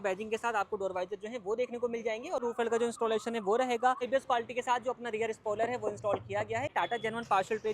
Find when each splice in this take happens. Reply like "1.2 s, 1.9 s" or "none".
2.4 s, 4.0 s, 6.7 s